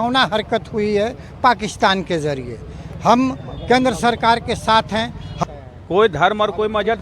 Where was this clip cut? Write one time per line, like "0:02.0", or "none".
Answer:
0:05.2

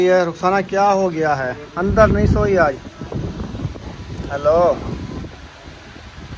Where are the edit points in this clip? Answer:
0:03.8
0:05.3

